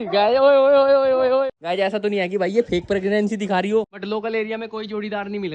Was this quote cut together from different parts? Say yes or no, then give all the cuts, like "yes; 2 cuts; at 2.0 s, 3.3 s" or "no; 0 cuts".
yes; 2 cuts; at 1.5 s, 3.9 s